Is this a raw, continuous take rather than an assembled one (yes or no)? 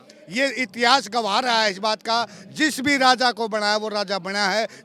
yes